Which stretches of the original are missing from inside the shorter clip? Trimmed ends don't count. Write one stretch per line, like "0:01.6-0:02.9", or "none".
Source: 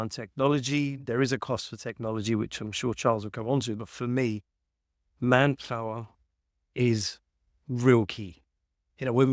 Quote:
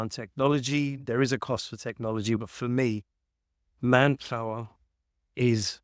0:02.4-0:03.8

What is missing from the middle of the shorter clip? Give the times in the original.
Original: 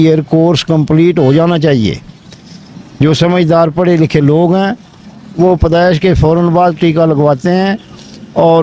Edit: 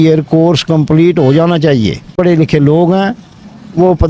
0:02.1-0:03.7

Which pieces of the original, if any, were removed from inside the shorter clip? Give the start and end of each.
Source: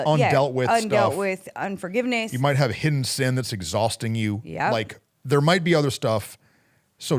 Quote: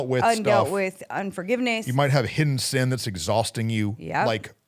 none

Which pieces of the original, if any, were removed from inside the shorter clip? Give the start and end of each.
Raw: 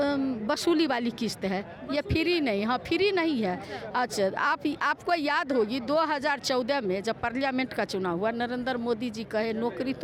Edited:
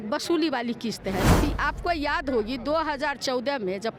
0:01.7-0:04.6

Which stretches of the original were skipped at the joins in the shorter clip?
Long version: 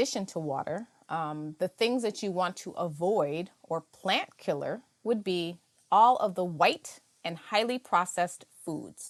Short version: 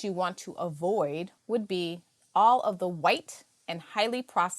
0:03.5-0:04.9

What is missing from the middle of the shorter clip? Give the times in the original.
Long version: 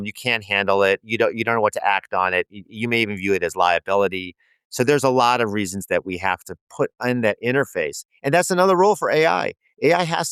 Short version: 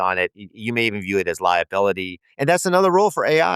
0:04.4-0:08.1

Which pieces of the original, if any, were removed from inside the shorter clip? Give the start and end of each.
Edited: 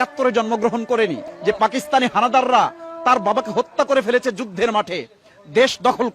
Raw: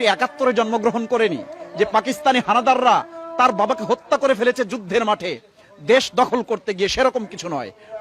0:01.5-0:01.6

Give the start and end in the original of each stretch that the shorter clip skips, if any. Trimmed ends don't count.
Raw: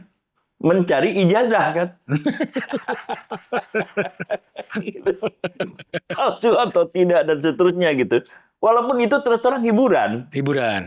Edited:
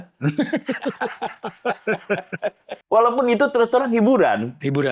0:04.6-0:08.4

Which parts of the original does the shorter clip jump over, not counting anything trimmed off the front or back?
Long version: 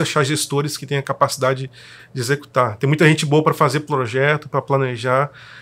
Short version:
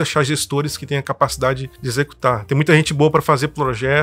0:01.7-0:02.1

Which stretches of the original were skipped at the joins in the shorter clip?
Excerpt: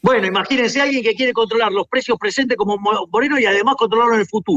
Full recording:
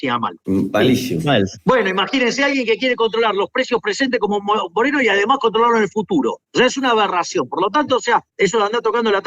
none

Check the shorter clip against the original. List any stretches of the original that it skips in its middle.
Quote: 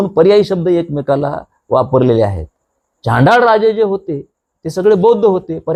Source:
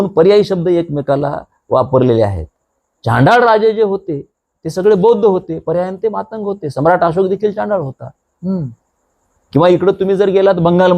none

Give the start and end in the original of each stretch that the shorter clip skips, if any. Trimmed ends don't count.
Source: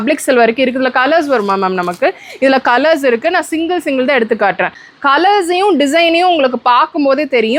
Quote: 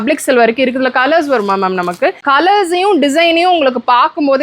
0:02.2-0:05.0

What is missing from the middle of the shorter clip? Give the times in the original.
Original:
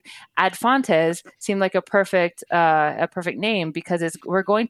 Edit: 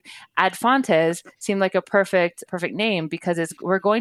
0:02.5-0:03.1

